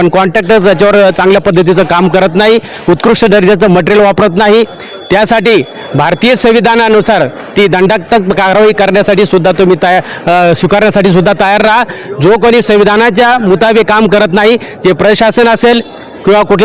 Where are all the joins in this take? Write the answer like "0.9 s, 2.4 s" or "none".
none